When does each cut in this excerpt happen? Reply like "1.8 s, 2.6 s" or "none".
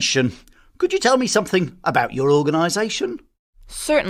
none